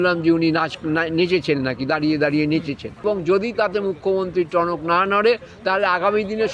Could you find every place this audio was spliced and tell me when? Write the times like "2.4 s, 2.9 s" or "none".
3.0 s